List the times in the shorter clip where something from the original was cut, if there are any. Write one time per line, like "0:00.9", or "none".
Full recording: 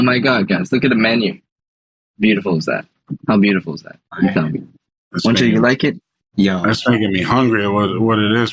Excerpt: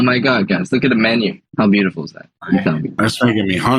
0:01.4
0:02.9